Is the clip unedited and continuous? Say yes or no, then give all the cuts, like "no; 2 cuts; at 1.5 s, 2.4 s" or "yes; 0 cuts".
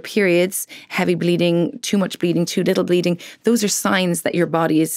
yes; 0 cuts